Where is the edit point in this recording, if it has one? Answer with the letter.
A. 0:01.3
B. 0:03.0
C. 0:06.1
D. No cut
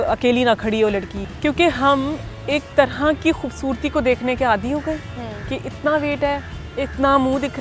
A